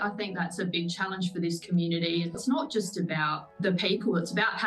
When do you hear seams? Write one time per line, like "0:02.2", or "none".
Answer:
0:02.4